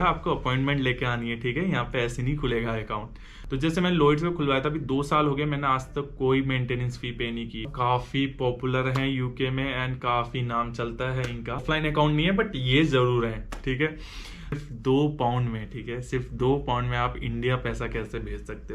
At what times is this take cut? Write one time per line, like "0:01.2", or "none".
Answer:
0:03.3
0:07.7
0:11.6
0:14.6

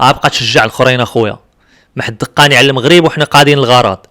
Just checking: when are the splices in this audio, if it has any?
none

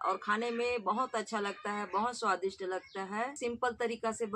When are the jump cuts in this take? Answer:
0:03.3

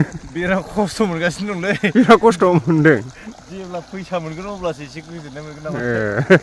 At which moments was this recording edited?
none

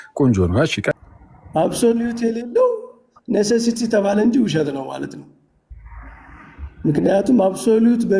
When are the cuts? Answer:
0:01.0

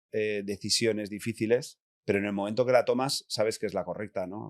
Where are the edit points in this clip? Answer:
0:01.9

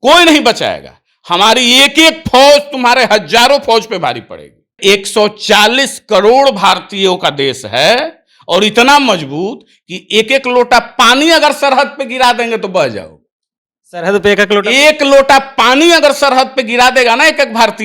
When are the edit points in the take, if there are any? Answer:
0:04.8

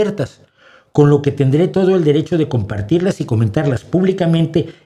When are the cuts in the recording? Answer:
none

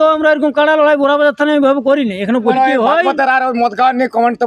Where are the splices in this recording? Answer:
0:02.5

